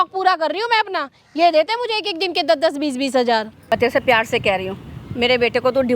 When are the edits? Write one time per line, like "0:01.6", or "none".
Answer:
0:03.5